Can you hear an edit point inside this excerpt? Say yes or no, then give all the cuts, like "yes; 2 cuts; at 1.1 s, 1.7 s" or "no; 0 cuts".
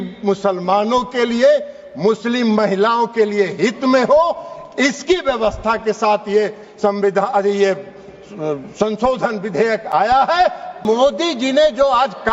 yes; 1 cut; at 10.8 s